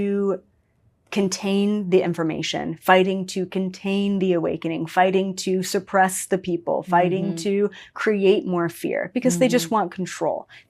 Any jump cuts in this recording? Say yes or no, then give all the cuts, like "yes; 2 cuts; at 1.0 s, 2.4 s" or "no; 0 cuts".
no; 0 cuts